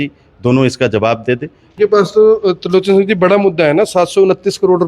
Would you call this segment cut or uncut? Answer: cut